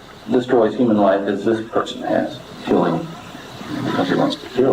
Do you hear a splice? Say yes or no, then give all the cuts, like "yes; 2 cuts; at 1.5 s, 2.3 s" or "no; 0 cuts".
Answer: yes; 1 cut; at 2.5 s